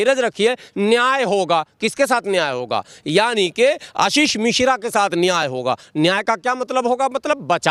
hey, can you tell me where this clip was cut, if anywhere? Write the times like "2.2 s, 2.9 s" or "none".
none